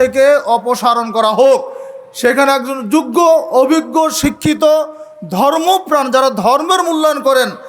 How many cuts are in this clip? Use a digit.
0